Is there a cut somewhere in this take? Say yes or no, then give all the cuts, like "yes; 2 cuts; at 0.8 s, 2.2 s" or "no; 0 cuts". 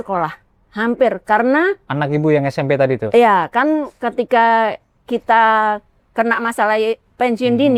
no; 0 cuts